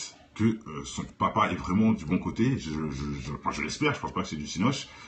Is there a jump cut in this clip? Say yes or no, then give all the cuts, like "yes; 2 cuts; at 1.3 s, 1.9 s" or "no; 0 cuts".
no; 0 cuts